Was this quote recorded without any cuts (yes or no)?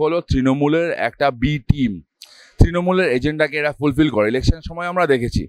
yes